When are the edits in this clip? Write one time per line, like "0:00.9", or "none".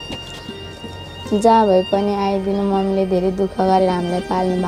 none